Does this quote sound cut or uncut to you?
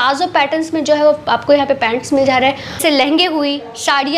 cut